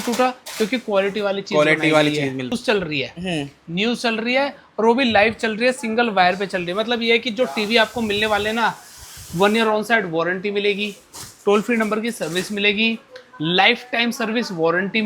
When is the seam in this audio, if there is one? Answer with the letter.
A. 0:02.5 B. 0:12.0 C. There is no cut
A